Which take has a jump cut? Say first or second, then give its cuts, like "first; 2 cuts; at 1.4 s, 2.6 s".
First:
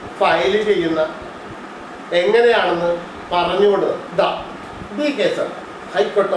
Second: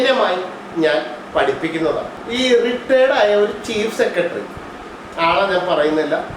second; 1 cut; at 2.2 s